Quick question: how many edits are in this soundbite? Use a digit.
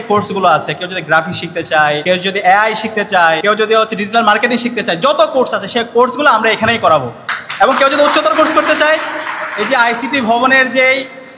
2